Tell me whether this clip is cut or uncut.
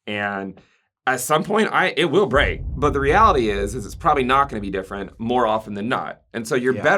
cut